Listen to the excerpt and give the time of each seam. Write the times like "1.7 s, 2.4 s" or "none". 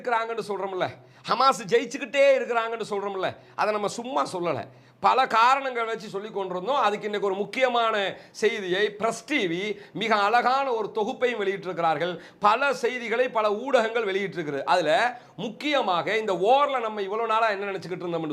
none